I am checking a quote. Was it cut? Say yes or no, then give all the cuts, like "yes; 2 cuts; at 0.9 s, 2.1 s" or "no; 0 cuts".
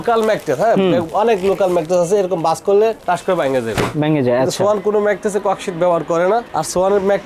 no; 0 cuts